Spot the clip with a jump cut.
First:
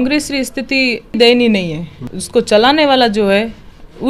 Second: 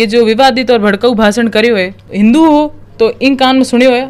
second; 1 cut; at 2.1 s

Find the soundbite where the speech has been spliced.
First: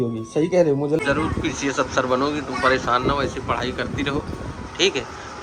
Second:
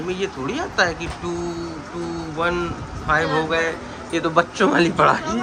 first; 1 cut; at 1.0 s

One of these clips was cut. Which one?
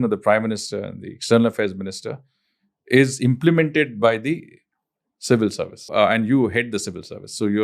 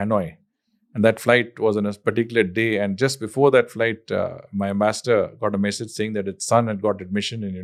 first; 1 cut; at 5.9 s

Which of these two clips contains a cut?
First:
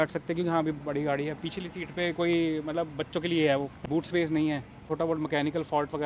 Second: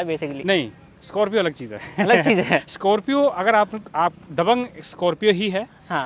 first; 2 cuts; at 3.8 s, 4.8 s

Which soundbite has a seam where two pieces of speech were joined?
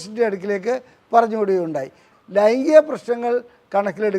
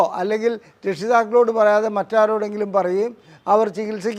first; 1 cut; at 2.1 s

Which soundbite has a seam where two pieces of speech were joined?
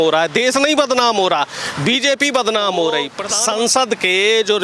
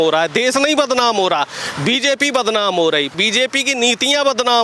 first; 1 cut; at 3.2 s

